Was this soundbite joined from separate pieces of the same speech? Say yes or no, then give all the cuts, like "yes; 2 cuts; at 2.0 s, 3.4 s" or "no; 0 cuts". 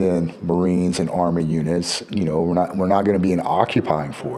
no; 0 cuts